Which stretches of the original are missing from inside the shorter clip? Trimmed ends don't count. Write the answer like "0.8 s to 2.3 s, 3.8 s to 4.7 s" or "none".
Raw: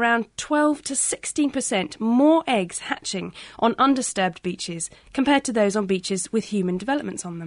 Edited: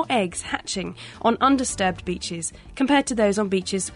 none